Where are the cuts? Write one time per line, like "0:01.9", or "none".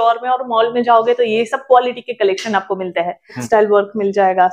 0:03.4